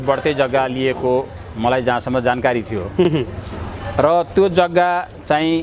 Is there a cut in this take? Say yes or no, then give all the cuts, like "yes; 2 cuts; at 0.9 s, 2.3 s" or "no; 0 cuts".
no; 0 cuts